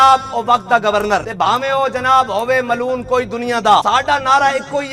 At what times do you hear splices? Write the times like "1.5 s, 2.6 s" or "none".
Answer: 1.3 s, 3.8 s